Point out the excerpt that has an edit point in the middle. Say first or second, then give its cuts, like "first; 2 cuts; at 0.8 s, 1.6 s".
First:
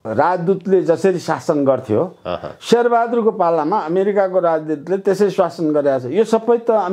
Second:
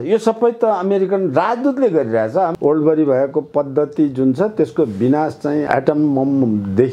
second; 2 cuts; at 2.5 s, 5.7 s